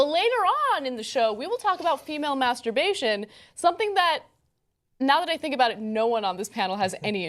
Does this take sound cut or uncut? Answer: cut